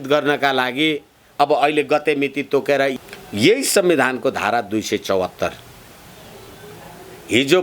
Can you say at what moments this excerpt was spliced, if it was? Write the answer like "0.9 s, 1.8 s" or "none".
2.9 s, 6.5 s